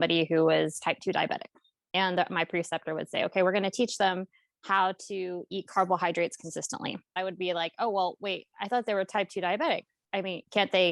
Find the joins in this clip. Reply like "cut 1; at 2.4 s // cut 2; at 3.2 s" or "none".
cut 1; at 7.0 s